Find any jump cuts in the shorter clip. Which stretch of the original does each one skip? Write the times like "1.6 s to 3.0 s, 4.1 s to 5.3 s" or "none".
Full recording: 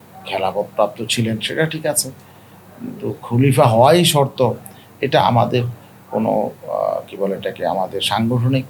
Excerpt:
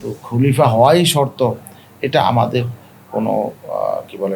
none